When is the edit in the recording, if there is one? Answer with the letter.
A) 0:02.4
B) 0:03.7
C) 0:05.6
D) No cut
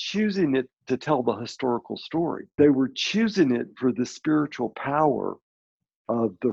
A